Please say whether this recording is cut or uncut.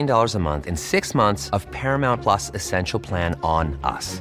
uncut